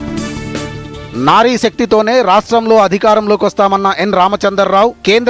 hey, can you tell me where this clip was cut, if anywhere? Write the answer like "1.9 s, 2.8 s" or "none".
none